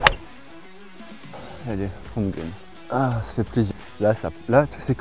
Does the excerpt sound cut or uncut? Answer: cut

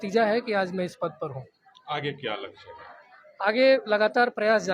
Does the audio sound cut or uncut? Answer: uncut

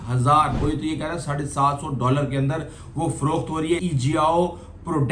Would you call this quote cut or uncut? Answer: cut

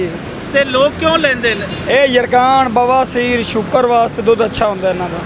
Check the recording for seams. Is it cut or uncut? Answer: uncut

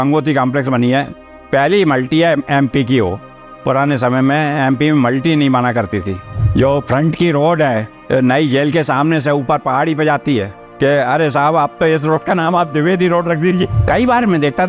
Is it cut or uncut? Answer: cut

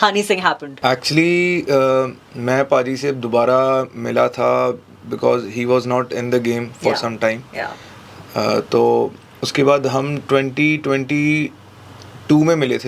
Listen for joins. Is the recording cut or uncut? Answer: uncut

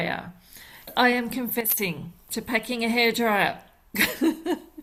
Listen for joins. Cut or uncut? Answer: uncut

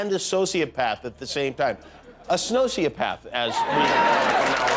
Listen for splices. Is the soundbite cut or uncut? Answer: uncut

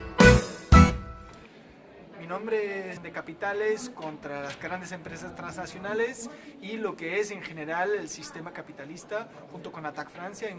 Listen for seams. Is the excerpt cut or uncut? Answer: uncut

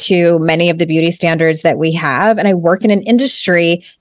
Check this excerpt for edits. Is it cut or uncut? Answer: uncut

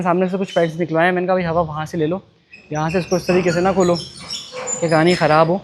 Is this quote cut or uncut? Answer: uncut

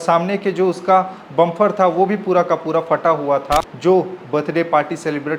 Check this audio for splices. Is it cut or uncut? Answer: cut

